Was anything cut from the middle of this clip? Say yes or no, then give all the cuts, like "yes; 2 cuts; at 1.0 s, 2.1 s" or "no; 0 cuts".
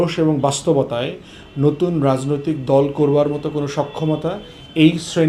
no; 0 cuts